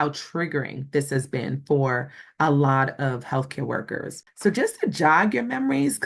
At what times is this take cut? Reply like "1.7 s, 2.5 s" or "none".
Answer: 4.2 s